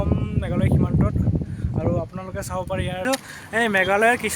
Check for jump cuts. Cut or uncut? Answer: cut